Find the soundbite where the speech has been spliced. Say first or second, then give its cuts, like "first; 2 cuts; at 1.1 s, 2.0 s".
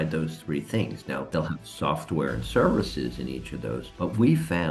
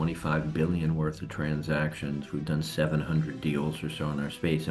first; 2 cuts; at 1.3 s, 3.8 s